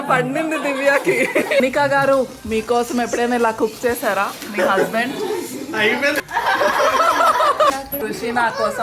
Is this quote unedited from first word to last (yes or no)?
no